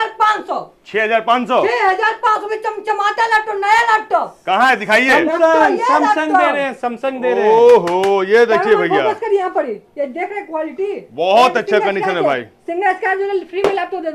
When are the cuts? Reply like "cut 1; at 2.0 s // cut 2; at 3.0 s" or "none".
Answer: none